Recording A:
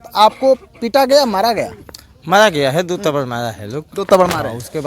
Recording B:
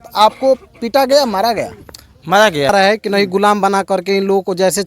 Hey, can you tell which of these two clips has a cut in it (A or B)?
B